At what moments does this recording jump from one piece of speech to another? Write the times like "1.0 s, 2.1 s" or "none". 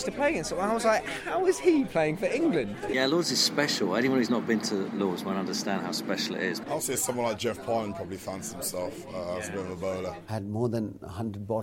2.8 s, 6.6 s, 10.2 s